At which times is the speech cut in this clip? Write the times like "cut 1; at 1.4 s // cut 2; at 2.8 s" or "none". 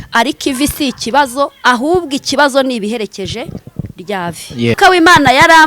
cut 1; at 4.7 s